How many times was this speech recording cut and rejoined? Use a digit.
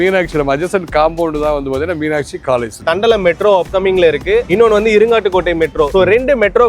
1